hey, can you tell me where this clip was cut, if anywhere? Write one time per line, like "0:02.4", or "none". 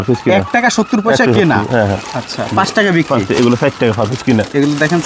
none

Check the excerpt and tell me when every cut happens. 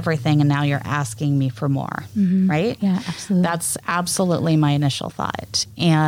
none

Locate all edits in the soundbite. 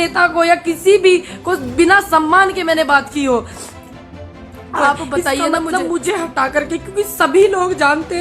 0:05.7

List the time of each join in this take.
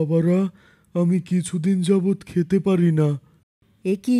none

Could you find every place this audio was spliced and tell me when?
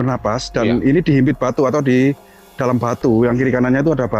none

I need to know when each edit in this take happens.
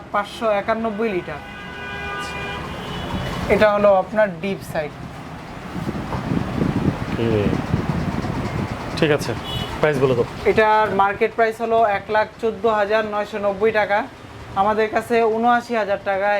none

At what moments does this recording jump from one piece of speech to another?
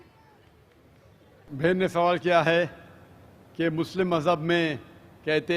0:01.7

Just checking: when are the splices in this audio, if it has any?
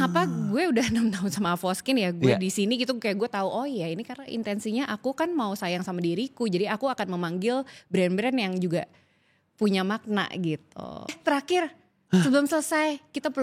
0:11.0

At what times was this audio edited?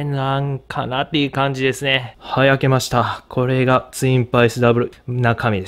0:02.2
0:04.9

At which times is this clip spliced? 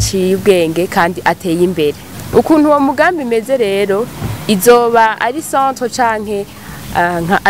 0:02.1

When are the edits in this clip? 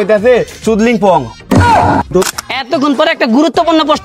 0:02.1

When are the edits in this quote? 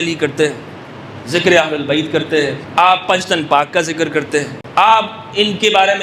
0:02.6
0:04.6

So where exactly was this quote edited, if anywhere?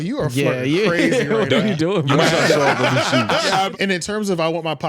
0:03.7

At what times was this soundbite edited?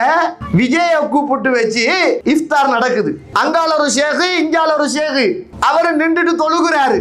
0:02.2
0:03.2
0:05.5

